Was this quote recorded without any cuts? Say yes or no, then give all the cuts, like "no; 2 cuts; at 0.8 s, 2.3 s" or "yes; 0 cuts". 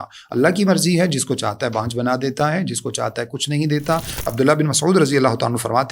no; 1 cut; at 4.3 s